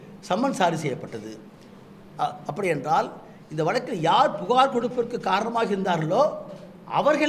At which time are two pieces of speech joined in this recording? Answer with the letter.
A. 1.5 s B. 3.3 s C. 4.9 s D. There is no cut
D